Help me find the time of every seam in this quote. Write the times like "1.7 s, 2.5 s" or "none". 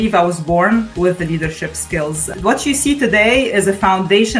0.9 s, 2.3 s